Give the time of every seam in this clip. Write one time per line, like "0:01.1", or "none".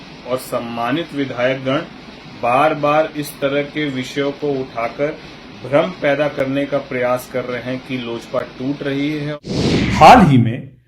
0:09.3